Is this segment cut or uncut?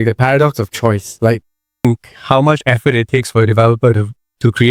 cut